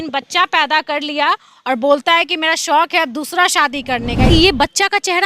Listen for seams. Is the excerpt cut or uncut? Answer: cut